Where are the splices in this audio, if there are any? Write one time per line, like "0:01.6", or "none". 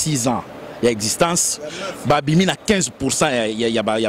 none